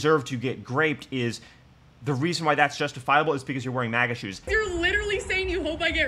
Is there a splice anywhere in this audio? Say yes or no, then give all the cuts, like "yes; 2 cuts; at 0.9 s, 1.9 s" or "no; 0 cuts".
yes; 1 cut; at 4.5 s